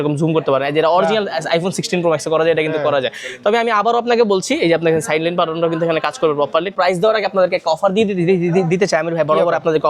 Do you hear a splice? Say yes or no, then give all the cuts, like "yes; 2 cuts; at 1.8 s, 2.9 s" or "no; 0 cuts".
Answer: yes; 1 cut; at 6.8 s